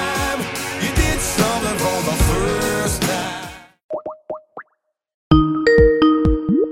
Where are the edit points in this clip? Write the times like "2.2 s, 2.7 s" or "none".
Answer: 3.9 s